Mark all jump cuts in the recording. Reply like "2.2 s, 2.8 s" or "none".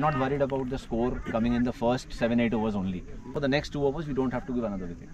3.3 s